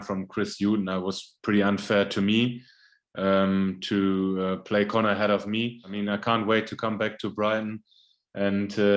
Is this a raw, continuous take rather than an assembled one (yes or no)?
no